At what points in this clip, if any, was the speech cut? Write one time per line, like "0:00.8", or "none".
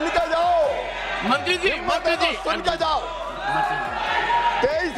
none